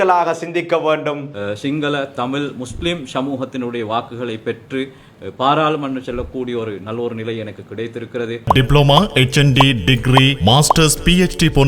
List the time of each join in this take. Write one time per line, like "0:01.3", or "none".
0:01.3
0:08.5